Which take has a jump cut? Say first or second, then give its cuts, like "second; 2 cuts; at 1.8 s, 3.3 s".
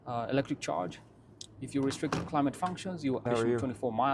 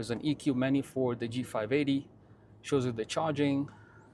first; 1 cut; at 3.2 s